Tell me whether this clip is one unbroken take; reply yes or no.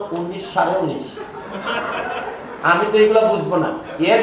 yes